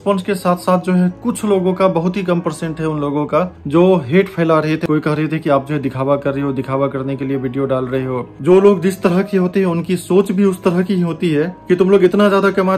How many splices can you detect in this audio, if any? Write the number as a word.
three